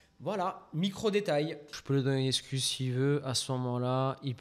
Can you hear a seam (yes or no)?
yes